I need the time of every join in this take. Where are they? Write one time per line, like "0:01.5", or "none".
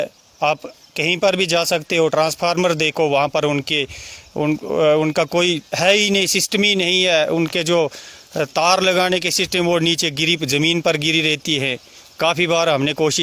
none

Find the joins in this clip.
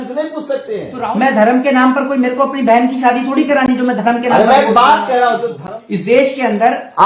0:00.9
0:05.6

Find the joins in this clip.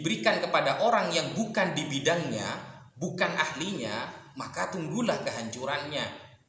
none

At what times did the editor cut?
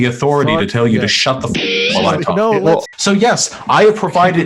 0:02.9

